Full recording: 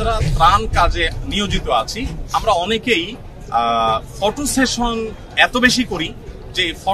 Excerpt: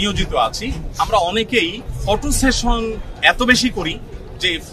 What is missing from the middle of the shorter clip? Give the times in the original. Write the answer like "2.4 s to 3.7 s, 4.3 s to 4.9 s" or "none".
3.3 s to 4.1 s